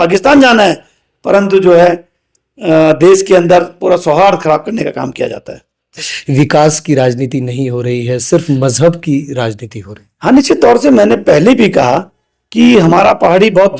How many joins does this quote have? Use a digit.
1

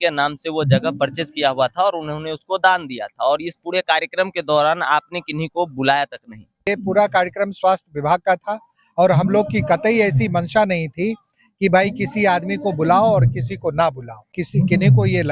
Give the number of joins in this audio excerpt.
2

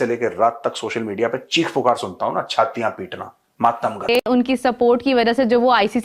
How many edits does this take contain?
1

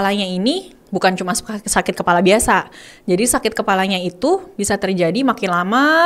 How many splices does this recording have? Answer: 0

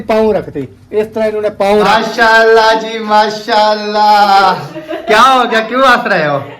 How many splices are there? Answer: 1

